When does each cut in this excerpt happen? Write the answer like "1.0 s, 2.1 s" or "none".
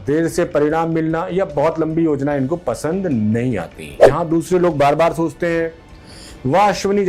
4.0 s

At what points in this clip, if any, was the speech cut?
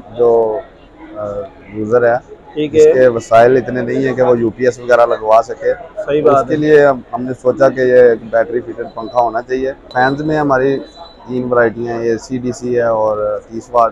9.8 s

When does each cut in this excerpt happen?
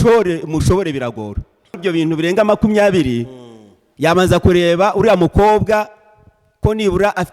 1.8 s

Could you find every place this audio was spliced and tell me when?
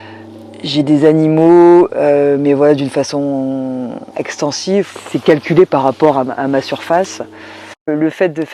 4.9 s

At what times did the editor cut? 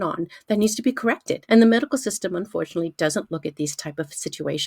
1.3 s

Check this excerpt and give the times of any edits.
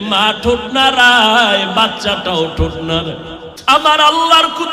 3.5 s

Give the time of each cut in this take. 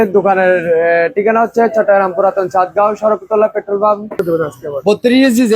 4.2 s

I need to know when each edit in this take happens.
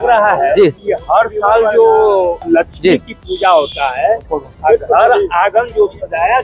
0.9 s, 2.4 s

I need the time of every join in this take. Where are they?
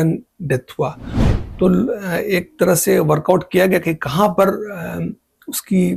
none

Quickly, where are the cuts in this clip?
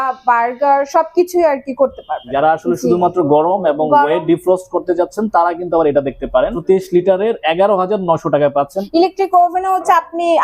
2.3 s, 6.6 s, 8.8 s

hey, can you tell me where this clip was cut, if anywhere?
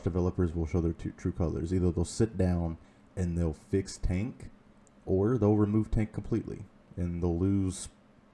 none

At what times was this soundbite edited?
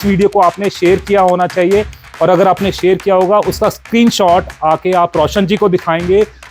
none

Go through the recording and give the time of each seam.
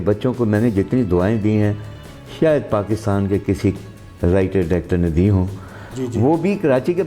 5.8 s

